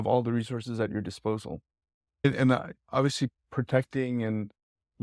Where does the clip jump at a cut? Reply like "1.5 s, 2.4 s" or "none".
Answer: 2.2 s